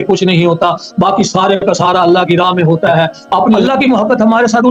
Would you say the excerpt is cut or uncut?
cut